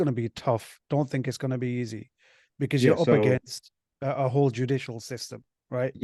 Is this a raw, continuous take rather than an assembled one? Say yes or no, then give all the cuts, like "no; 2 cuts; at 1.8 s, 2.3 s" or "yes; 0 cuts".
yes; 0 cuts